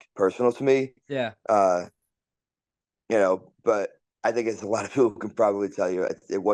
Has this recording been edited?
no; 0 cuts

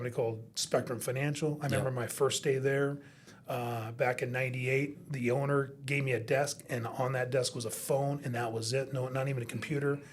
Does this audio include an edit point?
no; 0 cuts

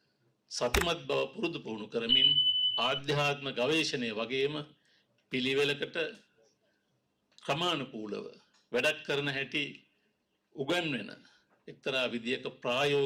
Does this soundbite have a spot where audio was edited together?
no; 0 cuts

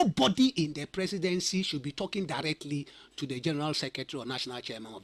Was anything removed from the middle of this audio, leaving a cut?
no; 0 cuts

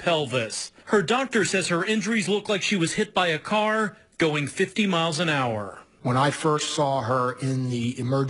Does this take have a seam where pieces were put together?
yes; 1 cut; at 6.9 s

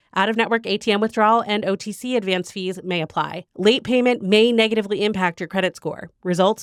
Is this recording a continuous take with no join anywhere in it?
yes; 0 cuts

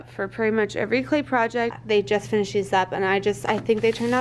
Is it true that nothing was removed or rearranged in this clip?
no; 1 cut; at 1.8 s

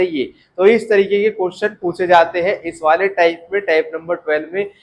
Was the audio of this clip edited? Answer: no; 0 cuts

